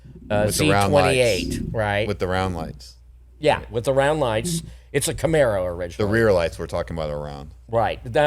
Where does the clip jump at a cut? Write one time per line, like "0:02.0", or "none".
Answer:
none